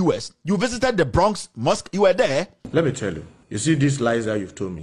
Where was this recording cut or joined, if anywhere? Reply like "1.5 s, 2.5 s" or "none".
2.6 s, 3.3 s